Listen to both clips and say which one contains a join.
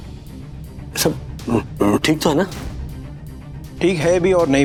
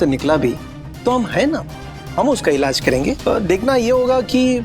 second; 1 cut; at 3.2 s

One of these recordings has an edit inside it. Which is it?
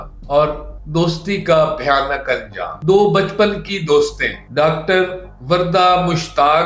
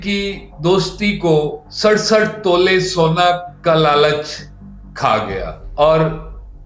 first; 1 cut; at 2.8 s

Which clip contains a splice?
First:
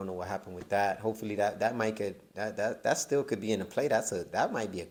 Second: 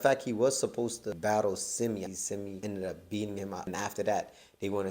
second; 3 cuts; at 1.1 s, 2.2 s, 3.7 s

